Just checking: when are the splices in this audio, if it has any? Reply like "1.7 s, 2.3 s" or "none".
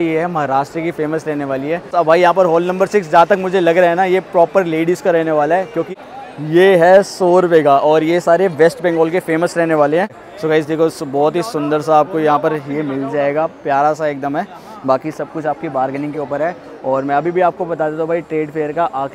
1.9 s, 5.8 s, 10.2 s